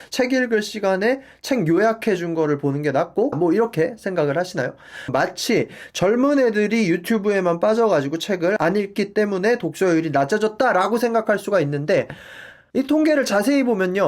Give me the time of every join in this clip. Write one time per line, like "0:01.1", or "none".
0:03.4
0:05.1